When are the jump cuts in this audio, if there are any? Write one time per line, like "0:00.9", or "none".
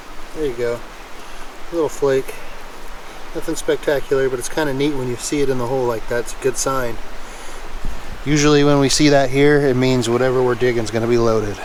none